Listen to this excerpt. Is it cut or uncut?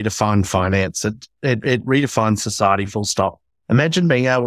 uncut